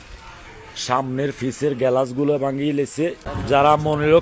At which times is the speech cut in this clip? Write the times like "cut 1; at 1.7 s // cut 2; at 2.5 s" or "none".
cut 1; at 3.3 s